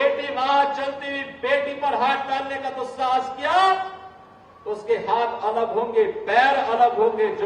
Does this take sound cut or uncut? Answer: uncut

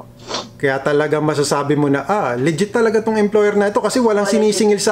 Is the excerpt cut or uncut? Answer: uncut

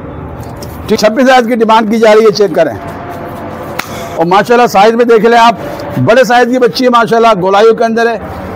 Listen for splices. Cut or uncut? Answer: cut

